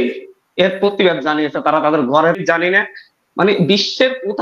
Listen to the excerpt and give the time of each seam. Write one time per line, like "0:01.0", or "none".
0:02.4